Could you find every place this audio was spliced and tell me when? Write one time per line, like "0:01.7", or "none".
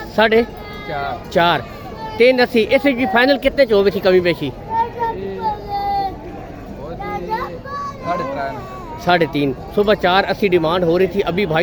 none